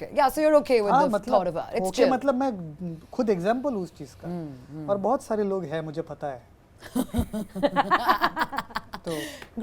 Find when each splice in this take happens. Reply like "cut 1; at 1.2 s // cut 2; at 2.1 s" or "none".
none